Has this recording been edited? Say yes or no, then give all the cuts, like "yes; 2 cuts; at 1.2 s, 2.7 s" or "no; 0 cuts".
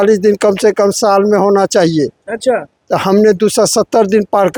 no; 0 cuts